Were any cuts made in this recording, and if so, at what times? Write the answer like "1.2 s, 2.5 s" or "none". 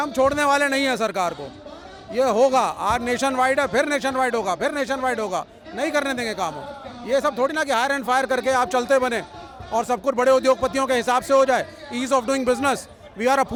none